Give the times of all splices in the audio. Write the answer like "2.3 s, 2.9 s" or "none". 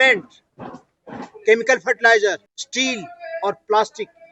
2.6 s